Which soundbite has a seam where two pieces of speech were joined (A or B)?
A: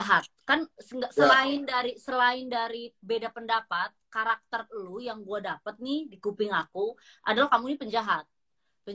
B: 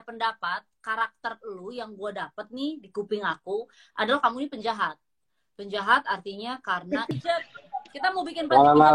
B